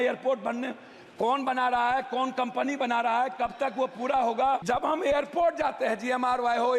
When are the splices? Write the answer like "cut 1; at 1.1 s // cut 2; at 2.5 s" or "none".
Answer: cut 1; at 4.6 s